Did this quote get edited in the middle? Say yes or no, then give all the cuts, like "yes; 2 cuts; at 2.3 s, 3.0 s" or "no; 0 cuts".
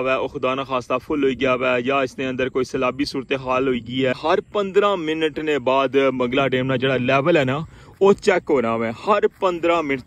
yes; 1 cut; at 4.2 s